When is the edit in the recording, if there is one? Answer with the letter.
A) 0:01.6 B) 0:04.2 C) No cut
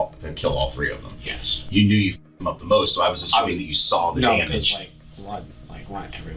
A